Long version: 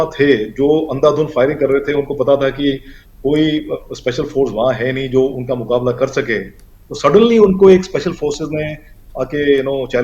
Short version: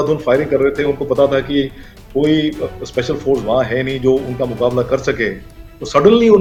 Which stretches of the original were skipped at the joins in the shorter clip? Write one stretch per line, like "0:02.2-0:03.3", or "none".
none